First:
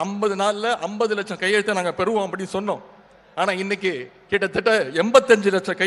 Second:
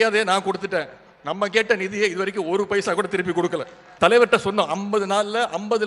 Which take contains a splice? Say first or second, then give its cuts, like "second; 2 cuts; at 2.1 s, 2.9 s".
second; 1 cut; at 3.8 s